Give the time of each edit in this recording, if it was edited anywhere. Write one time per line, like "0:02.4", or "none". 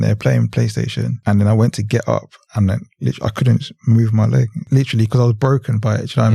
0:01.2
0:02.4
0:04.6